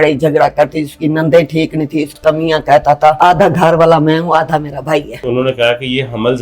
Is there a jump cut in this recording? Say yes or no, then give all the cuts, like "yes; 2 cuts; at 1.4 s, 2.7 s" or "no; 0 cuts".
yes; 3 cuts; at 2.2 s, 3.2 s, 5.2 s